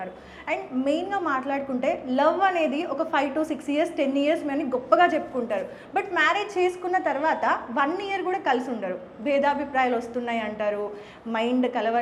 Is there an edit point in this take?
no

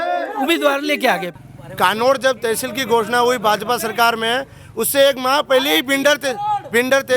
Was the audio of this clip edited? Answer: yes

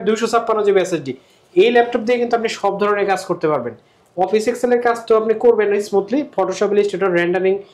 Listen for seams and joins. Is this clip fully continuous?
yes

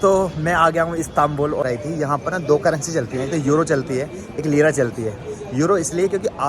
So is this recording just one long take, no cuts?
no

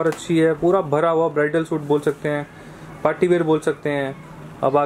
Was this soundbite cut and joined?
no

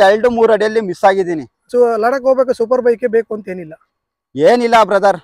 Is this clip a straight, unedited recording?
no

